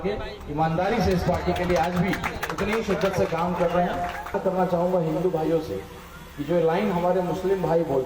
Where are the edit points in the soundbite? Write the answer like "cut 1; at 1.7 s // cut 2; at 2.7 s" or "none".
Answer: cut 1; at 4.4 s